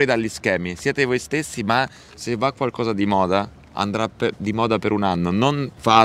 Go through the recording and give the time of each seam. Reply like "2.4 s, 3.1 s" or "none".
none